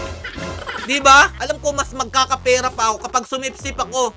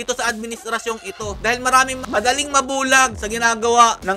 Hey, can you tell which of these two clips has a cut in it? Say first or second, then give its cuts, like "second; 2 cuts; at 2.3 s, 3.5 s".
first; 1 cut; at 1.4 s